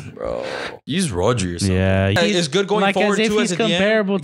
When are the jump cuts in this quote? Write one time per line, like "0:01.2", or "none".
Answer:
0:00.8
0:02.2